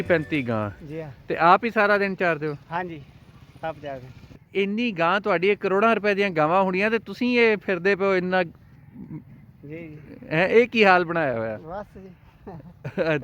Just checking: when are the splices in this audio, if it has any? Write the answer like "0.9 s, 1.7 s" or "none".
4.4 s